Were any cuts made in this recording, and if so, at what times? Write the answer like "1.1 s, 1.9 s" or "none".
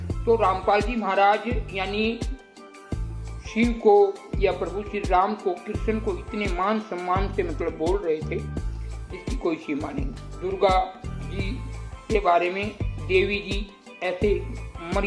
none